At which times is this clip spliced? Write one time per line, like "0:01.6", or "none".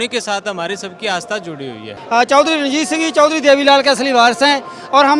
0:01.9